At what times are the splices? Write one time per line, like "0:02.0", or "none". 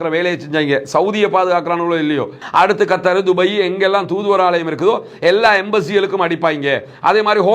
0:02.4